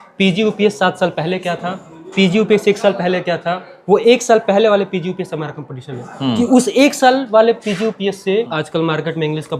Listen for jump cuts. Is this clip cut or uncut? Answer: cut